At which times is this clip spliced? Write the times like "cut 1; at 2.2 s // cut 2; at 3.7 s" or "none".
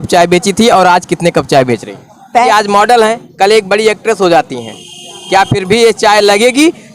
cut 1; at 2.5 s